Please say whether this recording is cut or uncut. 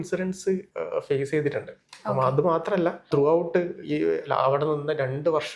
cut